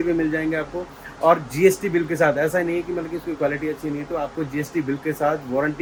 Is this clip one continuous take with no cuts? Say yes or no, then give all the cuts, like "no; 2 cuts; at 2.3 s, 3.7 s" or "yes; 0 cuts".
yes; 0 cuts